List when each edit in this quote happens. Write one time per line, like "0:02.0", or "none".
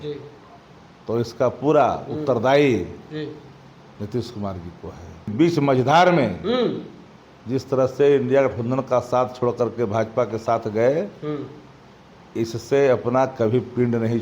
0:05.3